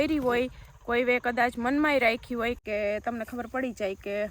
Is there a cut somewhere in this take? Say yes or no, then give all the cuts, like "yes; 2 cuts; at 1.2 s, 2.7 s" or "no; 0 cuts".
yes; 1 cut; at 2.6 s